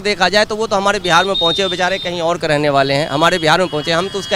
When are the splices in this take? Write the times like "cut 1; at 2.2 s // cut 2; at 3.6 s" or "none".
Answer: none